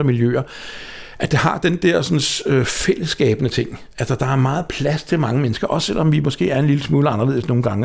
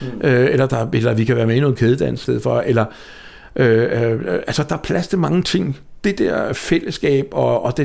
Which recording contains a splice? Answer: second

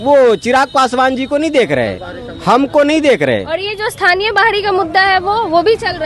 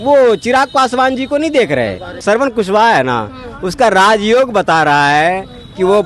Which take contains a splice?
second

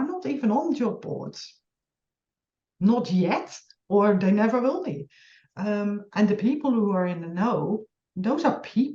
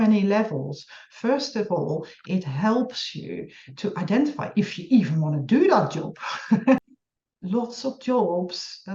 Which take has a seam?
second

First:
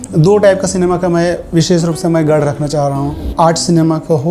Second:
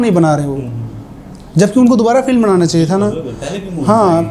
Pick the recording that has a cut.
first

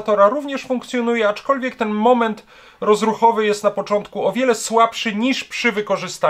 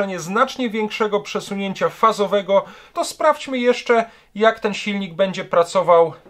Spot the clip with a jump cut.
second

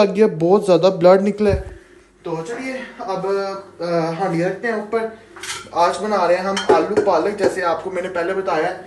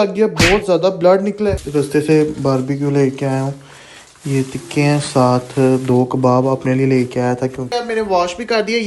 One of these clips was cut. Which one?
second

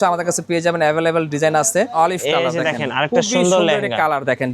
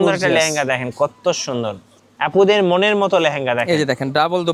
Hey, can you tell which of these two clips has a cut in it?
first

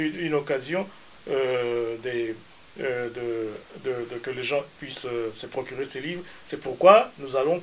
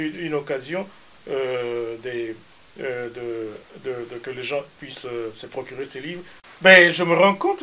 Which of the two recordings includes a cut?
second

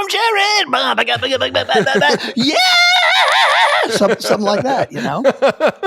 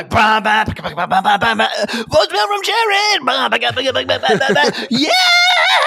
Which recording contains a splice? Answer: first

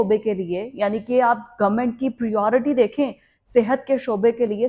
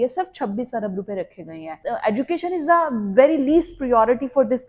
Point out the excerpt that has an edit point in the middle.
second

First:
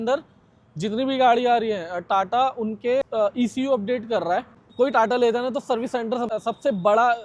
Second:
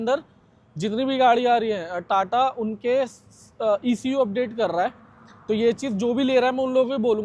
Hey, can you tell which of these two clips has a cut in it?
first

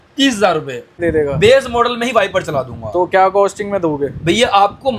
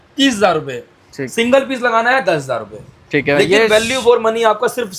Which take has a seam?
first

